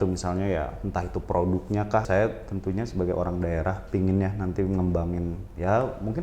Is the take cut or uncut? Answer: cut